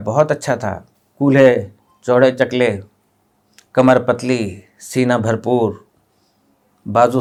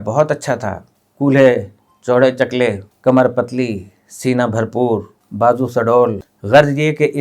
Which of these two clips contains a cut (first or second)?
second